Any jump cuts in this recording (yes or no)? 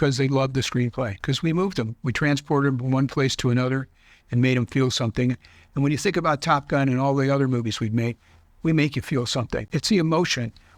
yes